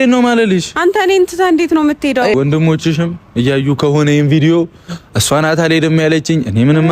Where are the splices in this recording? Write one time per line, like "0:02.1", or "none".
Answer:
0:02.3